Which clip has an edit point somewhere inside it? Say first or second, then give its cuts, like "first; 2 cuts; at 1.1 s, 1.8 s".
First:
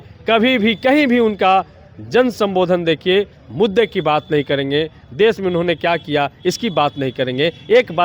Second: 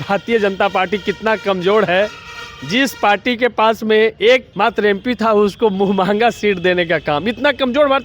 second; 1 cut; at 4.5 s